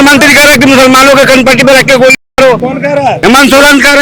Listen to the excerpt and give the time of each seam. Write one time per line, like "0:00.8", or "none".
0:03.0